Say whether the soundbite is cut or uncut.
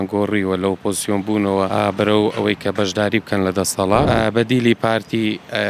cut